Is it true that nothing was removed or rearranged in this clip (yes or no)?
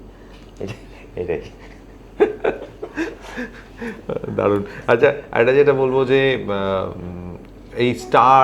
yes